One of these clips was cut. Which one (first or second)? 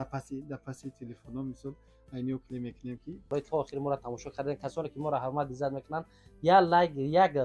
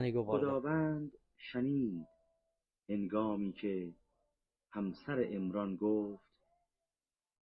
first